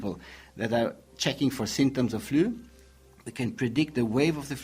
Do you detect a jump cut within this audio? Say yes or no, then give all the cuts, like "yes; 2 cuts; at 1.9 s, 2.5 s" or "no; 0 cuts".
no; 0 cuts